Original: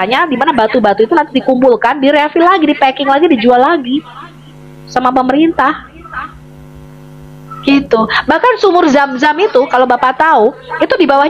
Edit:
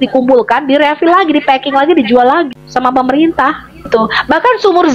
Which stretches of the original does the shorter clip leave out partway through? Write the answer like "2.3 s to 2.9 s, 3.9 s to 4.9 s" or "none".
3.8 s to 4.7 s, 6.1 s to 7.9 s